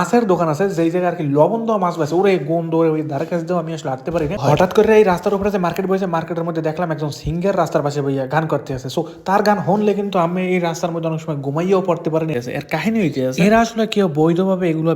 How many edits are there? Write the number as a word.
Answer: two